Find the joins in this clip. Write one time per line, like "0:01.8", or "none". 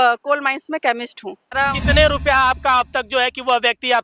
0:01.5